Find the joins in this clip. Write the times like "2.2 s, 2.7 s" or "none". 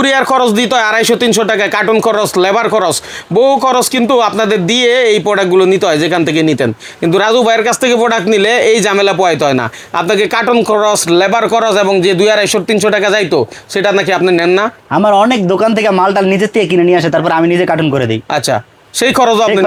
none